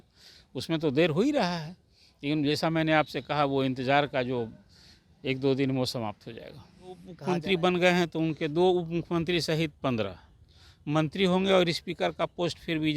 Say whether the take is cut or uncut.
cut